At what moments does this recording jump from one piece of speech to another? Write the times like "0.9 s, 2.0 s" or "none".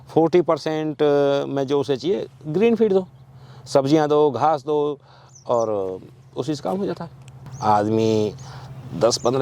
7.4 s